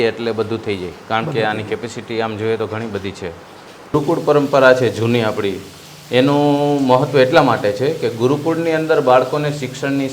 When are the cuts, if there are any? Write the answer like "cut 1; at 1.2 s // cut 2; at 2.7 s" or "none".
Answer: cut 1; at 3.9 s